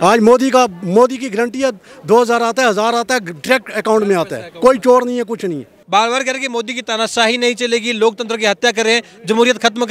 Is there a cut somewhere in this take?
yes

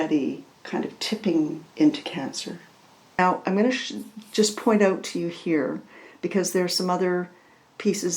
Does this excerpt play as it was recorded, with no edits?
no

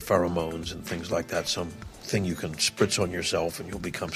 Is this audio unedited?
yes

